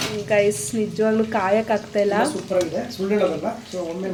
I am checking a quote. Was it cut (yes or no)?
no